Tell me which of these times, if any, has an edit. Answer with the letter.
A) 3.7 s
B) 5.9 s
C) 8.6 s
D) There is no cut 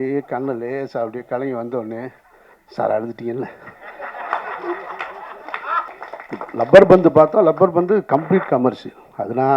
B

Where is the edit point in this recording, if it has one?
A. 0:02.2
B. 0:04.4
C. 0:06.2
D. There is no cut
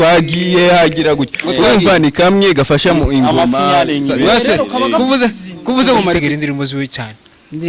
C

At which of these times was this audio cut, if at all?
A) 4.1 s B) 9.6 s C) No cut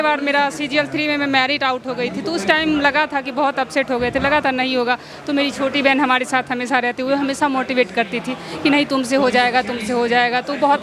C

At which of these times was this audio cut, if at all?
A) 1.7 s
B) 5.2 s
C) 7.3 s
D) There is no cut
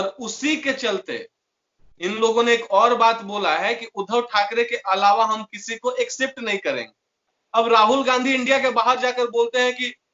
C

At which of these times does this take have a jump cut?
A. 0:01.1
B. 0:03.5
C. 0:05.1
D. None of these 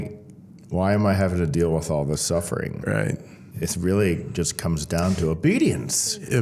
B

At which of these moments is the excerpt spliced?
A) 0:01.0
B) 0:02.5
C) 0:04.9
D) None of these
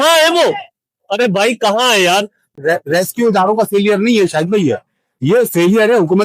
B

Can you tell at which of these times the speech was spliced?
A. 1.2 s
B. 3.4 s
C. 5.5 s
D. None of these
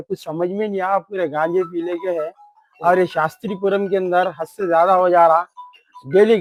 D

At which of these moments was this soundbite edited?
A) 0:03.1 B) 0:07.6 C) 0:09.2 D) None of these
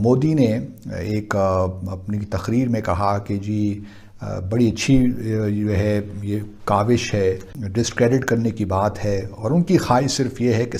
B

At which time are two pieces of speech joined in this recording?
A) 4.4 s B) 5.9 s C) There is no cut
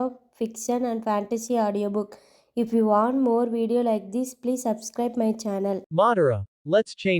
B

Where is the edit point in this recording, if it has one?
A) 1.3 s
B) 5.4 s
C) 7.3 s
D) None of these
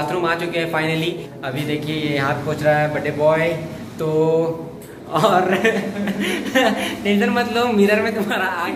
A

